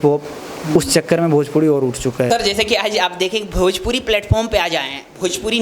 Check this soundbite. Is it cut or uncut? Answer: cut